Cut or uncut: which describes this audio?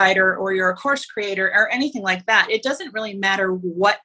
uncut